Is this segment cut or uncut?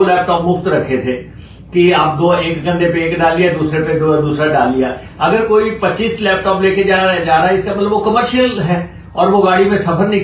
uncut